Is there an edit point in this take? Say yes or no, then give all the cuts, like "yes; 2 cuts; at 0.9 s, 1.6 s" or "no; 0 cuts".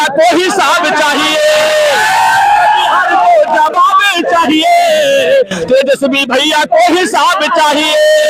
no; 0 cuts